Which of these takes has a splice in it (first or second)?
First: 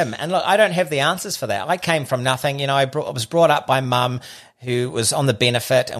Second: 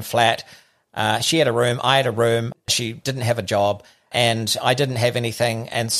second